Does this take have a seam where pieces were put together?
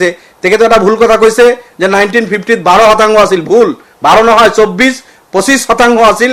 no; 0 cuts

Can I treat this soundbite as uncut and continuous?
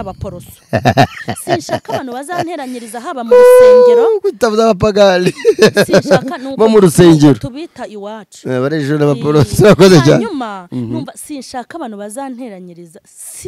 yes; 0 cuts

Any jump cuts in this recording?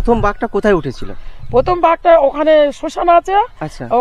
no; 0 cuts

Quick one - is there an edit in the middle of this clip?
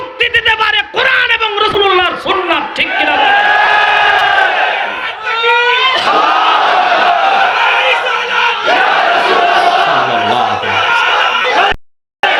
no; 0 cuts

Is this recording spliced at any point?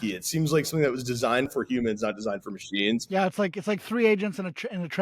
yes; 1 cut; at 1.5 s

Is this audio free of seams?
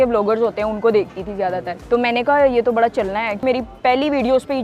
no; 2 cuts; at 1.7 s, 3.4 s

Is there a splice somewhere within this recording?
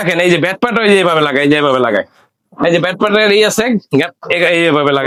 no; 0 cuts

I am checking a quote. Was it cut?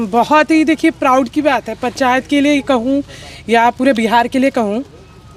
no; 0 cuts

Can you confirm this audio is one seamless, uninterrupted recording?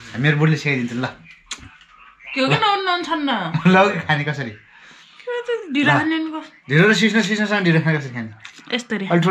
yes; 0 cuts

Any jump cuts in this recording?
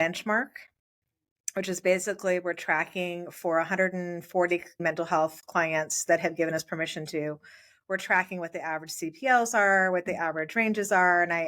yes; 1 cut; at 4.8 s

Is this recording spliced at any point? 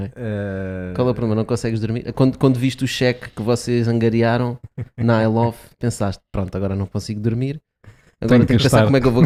no; 0 cuts

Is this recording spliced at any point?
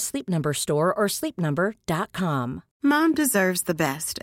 yes; 1 cut; at 2.6 s

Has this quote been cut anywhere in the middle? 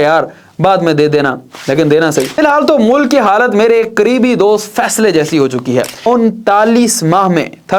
yes; 2 cuts; at 2.4 s, 6.1 s

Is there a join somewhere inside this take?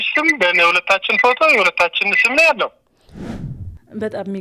yes; 1 cut; at 3.3 s

